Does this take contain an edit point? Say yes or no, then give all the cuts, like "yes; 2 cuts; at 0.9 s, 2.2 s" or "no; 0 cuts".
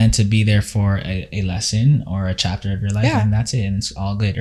no; 0 cuts